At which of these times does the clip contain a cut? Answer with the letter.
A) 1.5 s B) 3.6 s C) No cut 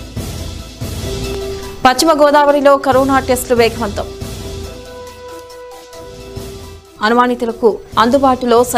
A